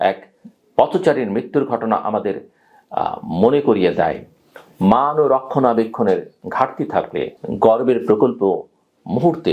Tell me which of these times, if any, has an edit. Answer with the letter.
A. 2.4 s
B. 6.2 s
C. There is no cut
C